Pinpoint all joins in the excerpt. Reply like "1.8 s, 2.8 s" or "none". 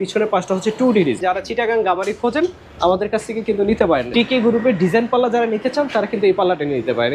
1.2 s, 4.1 s